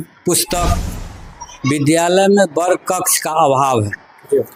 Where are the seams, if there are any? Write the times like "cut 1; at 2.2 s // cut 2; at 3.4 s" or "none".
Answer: cut 1; at 1.0 s